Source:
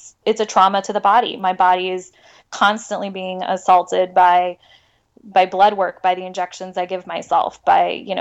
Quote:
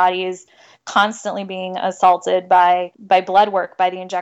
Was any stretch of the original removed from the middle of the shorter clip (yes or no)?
yes